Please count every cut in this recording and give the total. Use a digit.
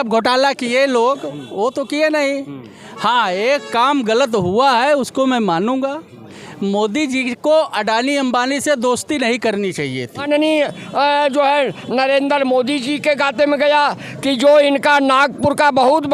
1